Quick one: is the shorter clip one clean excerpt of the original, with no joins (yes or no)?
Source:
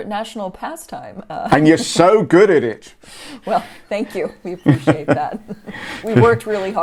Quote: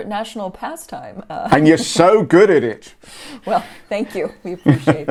yes